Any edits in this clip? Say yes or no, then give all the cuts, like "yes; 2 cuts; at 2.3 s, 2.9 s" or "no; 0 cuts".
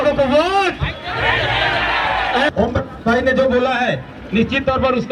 yes; 1 cut; at 2.5 s